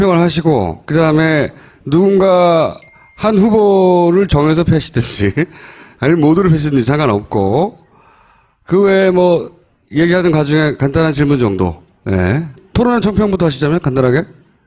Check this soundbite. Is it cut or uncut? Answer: cut